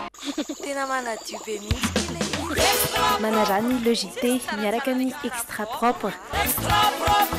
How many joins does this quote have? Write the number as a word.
zero